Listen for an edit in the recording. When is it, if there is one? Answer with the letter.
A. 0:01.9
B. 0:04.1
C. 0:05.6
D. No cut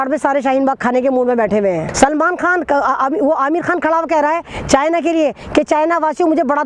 A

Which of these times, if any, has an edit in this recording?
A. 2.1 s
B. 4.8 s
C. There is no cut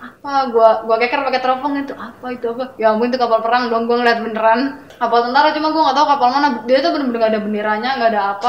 B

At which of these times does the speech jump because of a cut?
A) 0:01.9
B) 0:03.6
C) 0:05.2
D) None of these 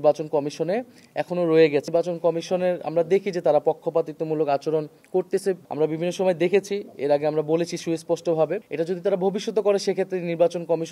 A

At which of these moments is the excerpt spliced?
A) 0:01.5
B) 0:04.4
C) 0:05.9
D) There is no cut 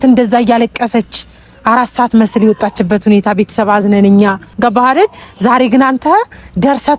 B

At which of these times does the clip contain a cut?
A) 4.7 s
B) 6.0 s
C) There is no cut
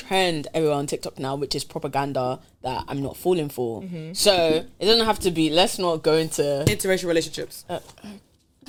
C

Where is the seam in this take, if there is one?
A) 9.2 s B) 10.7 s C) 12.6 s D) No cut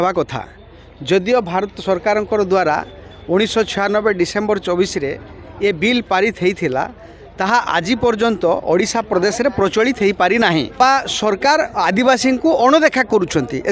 B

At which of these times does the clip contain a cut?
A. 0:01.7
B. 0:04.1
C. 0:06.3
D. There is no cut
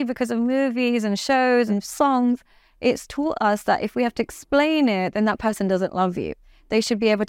A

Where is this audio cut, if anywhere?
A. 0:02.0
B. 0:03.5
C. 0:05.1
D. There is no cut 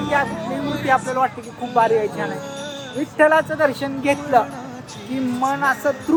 D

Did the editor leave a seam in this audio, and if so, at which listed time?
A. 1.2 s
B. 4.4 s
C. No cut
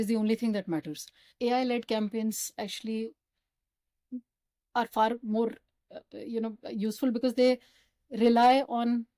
C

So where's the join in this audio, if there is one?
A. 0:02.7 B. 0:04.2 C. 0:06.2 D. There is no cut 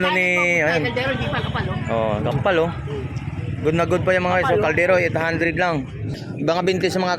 C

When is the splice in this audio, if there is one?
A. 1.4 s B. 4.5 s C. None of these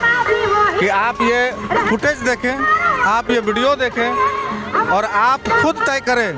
C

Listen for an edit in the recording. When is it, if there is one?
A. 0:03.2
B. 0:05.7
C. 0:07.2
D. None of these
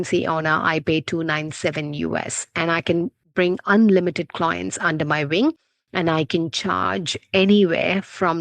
D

